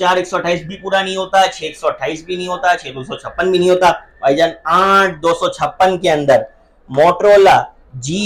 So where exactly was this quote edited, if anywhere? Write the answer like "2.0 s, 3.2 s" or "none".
none